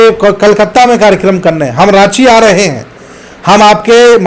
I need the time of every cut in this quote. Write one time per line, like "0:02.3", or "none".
none